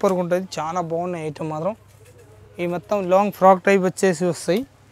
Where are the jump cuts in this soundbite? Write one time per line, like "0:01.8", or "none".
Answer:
none

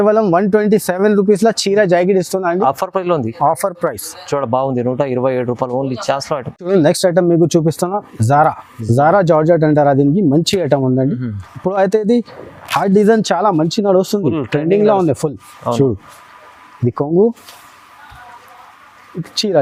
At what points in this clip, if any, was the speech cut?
none

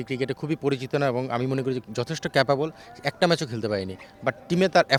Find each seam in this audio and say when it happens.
none

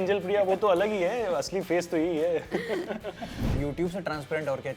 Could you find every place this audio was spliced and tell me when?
0:03.6

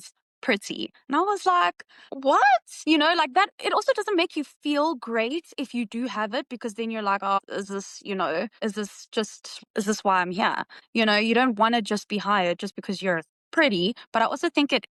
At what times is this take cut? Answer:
none

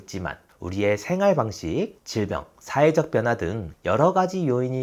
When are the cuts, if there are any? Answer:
0:02.3

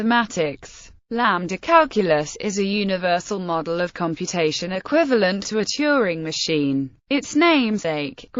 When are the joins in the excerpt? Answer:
0:00.9
0:02.3

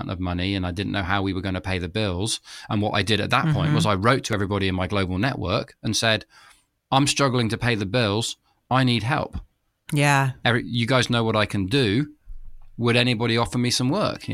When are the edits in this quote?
none

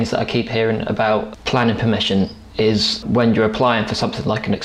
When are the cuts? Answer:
0:01.3
0:03.1

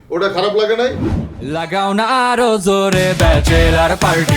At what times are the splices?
0:01.5

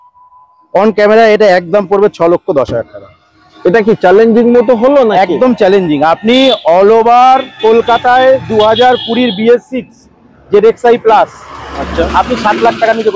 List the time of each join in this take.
none

